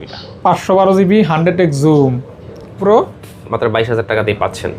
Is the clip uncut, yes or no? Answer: no